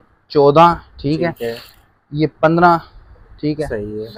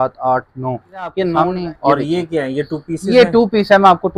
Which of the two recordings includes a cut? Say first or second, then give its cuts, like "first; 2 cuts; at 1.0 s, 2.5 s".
second; 1 cut; at 1.3 s